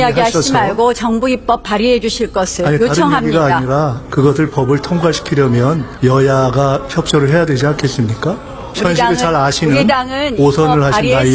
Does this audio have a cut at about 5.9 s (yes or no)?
yes